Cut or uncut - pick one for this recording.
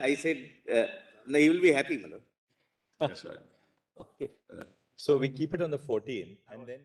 uncut